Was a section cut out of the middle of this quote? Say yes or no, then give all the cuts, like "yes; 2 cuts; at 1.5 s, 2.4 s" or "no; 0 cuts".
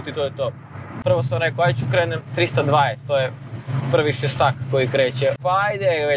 yes; 2 cuts; at 0.9 s, 5.4 s